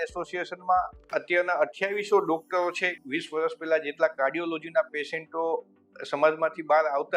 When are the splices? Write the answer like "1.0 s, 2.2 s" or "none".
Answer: 3.0 s